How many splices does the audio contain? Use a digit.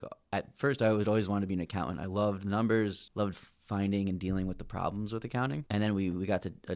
2